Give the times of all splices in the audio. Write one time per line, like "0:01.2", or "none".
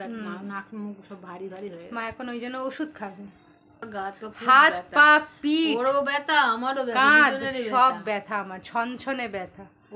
0:03.9